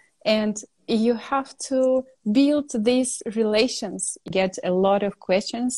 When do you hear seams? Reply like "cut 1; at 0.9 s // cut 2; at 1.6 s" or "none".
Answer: cut 1; at 4.3 s